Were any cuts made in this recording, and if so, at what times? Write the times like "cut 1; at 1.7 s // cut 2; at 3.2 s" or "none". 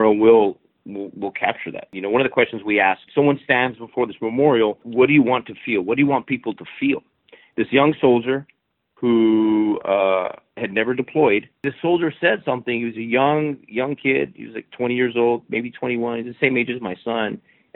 cut 1; at 1.9 s // cut 2; at 3.0 s // cut 3; at 4.9 s // cut 4; at 7.3 s // cut 5; at 11.7 s